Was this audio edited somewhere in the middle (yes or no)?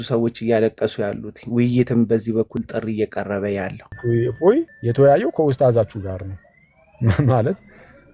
yes